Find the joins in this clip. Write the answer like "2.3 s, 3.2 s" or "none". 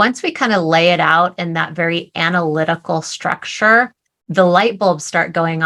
none